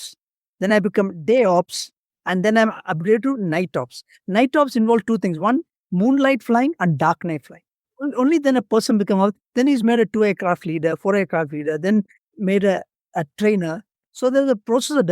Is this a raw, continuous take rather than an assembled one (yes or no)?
no